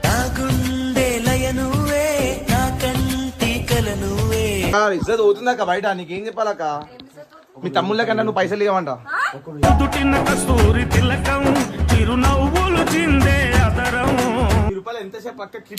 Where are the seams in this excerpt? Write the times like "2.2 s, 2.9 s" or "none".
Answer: 4.7 s, 14.7 s